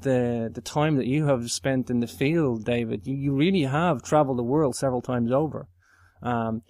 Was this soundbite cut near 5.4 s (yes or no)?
no